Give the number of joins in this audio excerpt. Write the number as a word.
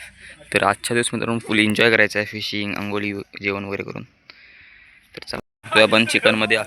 one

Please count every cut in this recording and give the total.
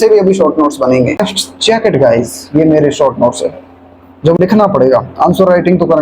two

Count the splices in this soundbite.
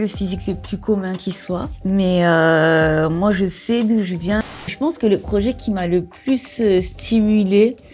one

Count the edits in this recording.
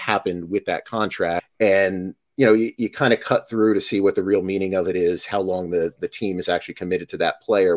one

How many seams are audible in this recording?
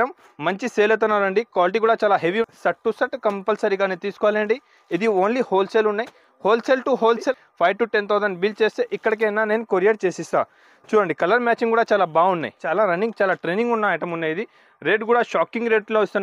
three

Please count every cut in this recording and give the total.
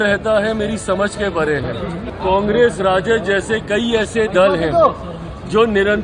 one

